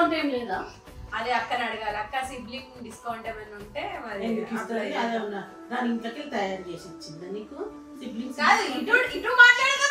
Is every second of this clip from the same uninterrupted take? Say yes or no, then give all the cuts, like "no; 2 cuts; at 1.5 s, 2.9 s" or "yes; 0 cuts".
yes; 0 cuts